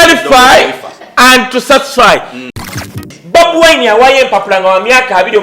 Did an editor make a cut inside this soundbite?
yes; 1 cut; at 2.8 s

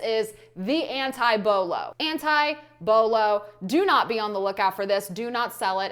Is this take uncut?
no; 1 cut; at 2.0 s

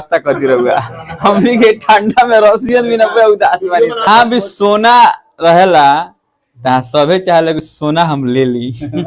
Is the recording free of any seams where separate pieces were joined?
no; 1 cut; at 4.1 s

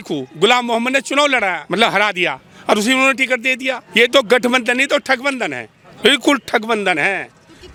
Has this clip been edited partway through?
no; 0 cuts

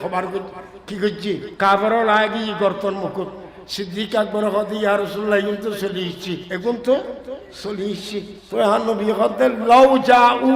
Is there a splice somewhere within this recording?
yes; 3 cuts; at 1.5 s, 6.5 s, 8.4 s

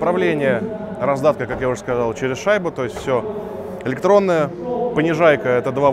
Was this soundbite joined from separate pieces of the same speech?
no; 0 cuts

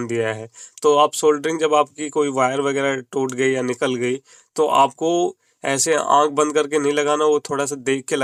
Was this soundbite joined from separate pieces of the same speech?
no; 0 cuts

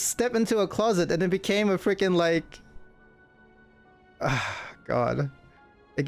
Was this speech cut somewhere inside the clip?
no; 0 cuts

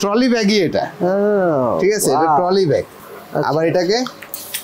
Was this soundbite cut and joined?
no; 0 cuts

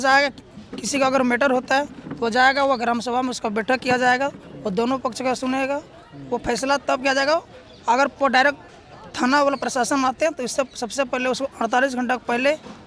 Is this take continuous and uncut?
yes; 0 cuts

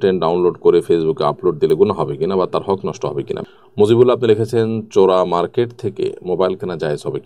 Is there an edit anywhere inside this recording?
yes; 1 cut; at 3.4 s

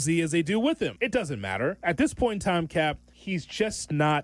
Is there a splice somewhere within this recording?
yes; 2 cuts; at 1.2 s, 3.1 s

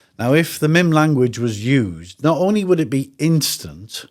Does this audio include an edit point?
no; 0 cuts

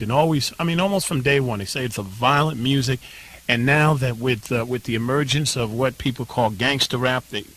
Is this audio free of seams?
no; 1 cut; at 4.9 s

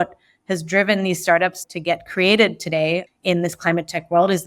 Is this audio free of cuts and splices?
no; 1 cut; at 1.6 s

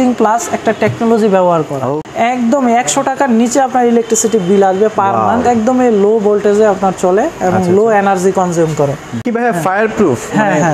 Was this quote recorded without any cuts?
no; 2 cuts; at 2.0 s, 9.2 s

